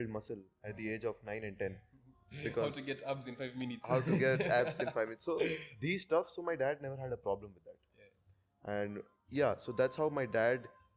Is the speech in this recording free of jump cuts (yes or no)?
yes